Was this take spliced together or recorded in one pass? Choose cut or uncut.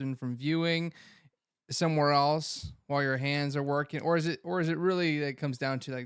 uncut